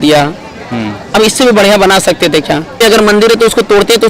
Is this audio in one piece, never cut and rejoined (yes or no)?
no